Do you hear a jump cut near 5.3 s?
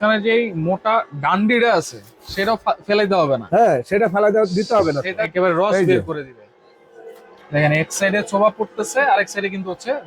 yes; 1 cut; at 5.3 s

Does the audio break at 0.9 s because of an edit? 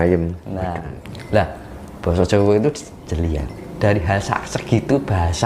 yes; 1 cut; at 0.9 s

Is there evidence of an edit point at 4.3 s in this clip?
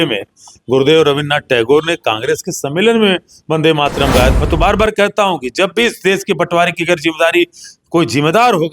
yes; 2 cuts; at 4.3 s, 7.7 s

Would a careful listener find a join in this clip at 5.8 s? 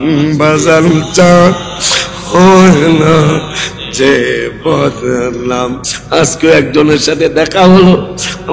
yes; 1 cut; at 5.8 s

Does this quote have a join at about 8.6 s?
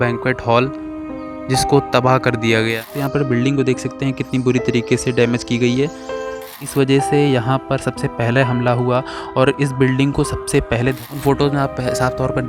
no; 3 cuts; at 2.9 s, 6.5 s, 11.1 s

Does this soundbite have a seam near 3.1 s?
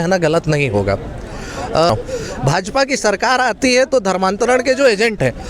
no; 1 cut; at 1.9 s

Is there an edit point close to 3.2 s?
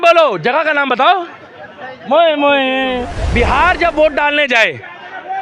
yes; 1 cut; at 3.2 s

